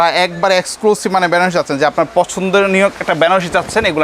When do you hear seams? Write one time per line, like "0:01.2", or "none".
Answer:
none